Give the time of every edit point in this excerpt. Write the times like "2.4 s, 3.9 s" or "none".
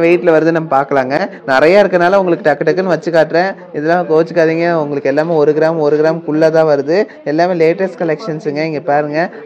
none